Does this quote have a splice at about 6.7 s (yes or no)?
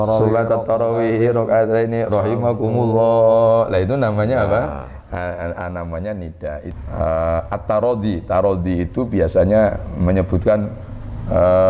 yes